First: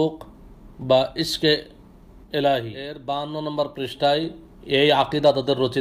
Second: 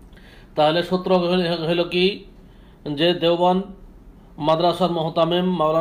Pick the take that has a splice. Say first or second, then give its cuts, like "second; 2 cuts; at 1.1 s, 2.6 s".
first; 1 cut; at 3.0 s